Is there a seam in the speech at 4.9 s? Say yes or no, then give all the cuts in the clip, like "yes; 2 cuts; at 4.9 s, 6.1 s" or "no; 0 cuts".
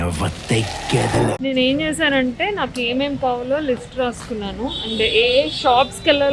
no; 1 cut; at 1.4 s